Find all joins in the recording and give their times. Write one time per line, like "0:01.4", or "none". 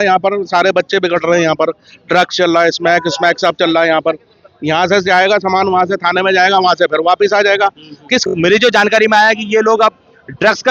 0:08.2